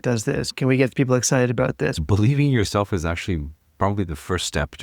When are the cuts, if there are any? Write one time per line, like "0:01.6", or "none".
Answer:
0:02.0